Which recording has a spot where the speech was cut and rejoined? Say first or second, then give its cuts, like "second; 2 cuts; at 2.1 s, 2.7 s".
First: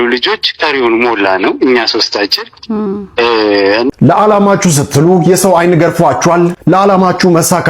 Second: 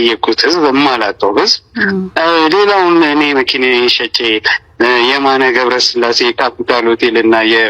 first; 1 cut; at 3.9 s